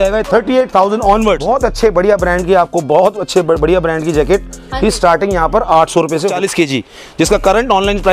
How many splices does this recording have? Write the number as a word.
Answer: two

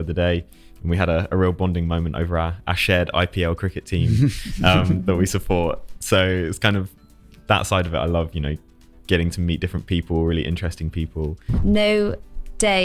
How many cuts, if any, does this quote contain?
one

